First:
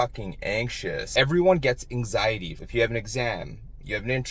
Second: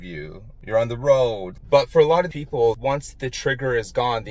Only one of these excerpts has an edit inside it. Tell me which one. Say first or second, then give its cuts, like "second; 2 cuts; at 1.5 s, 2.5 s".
first; 2 cuts; at 1.1 s, 2.6 s